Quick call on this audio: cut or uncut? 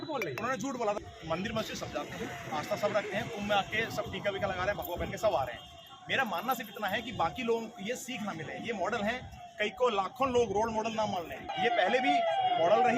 cut